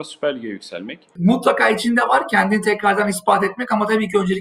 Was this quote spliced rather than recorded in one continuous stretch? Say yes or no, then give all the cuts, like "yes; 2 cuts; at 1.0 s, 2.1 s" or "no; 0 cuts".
yes; 1 cut; at 1.1 s